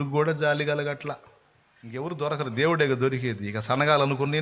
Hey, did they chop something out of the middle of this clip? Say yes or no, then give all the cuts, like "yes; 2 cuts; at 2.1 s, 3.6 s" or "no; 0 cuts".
yes; 1 cut; at 2.0 s